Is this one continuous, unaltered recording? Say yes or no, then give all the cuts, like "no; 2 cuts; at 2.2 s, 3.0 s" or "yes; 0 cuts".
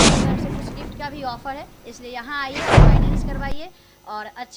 no; 3 cuts; at 0.9 s, 2.5 s, 3.4 s